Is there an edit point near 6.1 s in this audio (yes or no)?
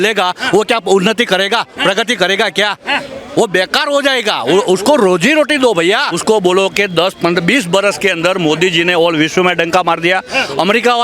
yes